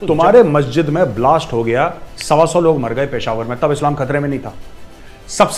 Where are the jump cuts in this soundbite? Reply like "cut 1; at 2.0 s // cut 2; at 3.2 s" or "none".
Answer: none